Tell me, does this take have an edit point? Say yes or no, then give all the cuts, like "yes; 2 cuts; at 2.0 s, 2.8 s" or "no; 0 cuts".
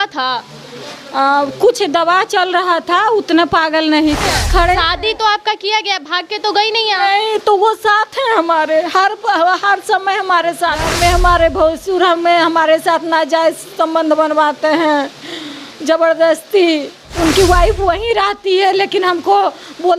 yes; 3 cuts; at 4.2 s, 10.9 s, 17.0 s